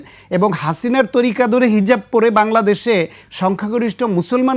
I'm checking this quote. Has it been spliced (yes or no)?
no